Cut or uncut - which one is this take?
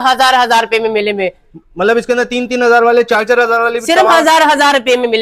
uncut